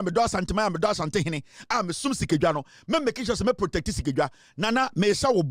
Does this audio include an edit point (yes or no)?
no